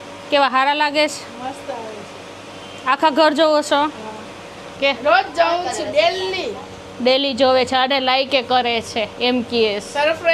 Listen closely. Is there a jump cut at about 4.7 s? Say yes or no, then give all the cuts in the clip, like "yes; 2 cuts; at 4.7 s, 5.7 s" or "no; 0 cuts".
yes; 1 cut; at 4.7 s